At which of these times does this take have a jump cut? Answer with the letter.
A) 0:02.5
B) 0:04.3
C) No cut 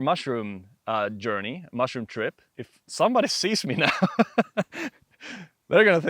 A